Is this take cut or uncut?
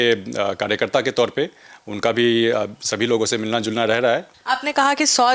cut